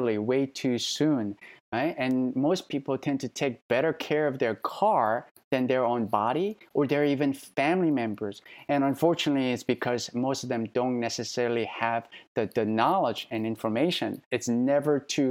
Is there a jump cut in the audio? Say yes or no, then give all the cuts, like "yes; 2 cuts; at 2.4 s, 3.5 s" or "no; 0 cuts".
yes; 1 cut; at 14.3 s